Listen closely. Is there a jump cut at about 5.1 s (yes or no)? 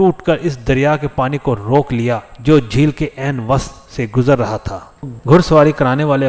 yes